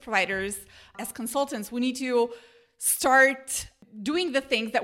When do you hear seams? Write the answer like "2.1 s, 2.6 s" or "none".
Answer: 0.9 s